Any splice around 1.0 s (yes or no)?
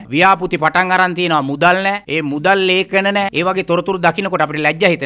no